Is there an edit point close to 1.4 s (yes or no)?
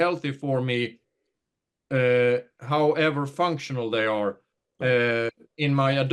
no